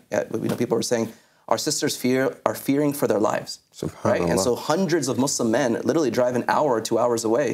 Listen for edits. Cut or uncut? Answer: uncut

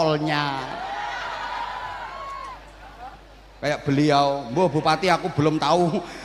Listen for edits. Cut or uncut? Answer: cut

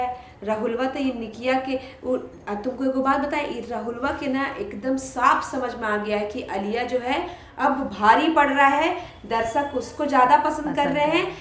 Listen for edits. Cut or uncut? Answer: uncut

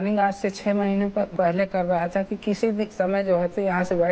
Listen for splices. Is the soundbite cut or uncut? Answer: cut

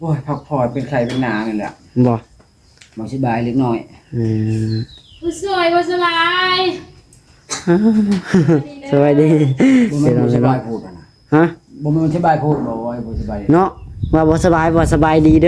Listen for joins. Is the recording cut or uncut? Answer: uncut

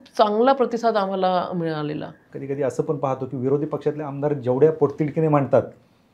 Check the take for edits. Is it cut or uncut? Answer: cut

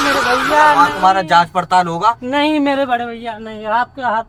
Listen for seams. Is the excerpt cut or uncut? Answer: uncut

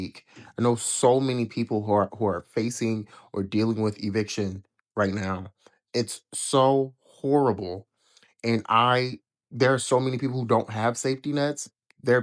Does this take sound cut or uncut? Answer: uncut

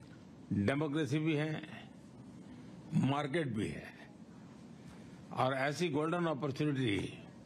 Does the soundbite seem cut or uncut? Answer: uncut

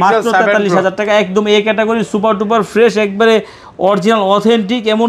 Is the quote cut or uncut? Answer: uncut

